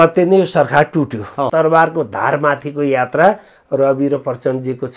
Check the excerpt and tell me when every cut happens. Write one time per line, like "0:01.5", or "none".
0:01.5